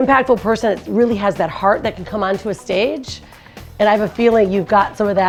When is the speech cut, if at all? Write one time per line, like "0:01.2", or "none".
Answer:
none